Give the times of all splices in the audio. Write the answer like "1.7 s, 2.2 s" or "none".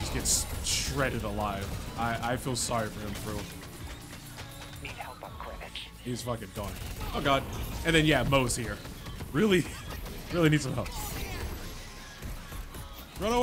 none